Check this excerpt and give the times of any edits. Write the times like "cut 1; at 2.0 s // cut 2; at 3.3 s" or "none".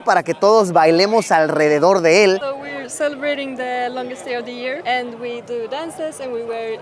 cut 1; at 2.4 s